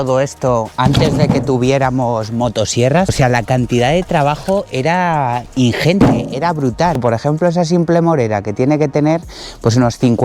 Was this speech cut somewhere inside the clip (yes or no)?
yes